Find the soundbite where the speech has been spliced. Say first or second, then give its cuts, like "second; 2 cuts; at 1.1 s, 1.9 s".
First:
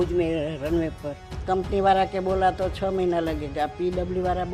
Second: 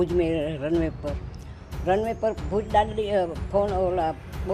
first; 1 cut; at 1.4 s